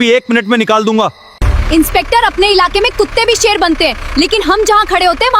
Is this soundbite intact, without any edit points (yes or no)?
no